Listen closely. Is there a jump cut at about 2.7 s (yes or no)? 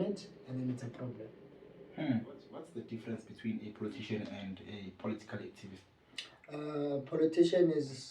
yes